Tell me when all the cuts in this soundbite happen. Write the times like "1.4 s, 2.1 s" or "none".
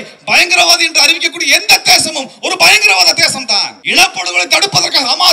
3.8 s